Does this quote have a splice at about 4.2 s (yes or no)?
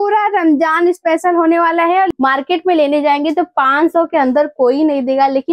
no